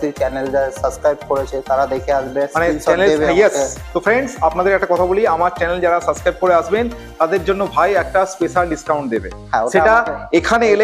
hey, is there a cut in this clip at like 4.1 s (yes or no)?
no